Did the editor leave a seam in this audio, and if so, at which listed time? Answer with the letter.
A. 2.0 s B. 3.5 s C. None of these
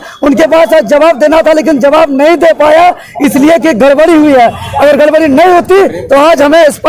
C